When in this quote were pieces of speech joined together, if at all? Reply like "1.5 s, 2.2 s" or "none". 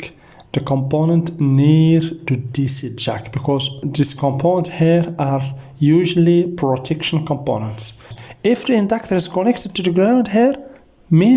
3.8 s, 8.1 s